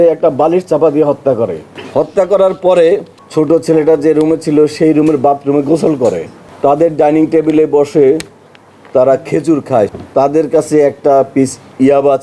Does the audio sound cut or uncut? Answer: cut